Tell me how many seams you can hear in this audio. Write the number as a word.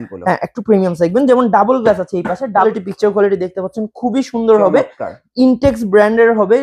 one